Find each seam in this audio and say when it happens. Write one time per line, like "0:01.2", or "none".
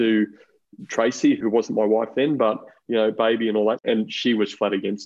0:03.8